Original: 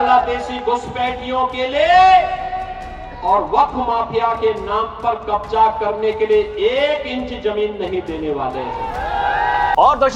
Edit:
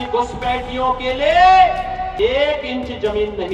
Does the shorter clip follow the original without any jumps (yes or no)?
no